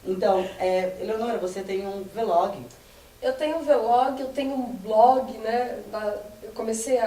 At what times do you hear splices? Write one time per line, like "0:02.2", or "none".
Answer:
none